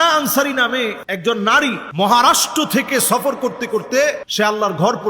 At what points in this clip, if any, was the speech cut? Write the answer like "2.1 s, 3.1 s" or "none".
1.1 s, 1.9 s, 4.2 s